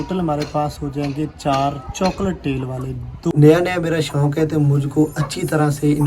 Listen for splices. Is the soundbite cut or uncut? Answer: cut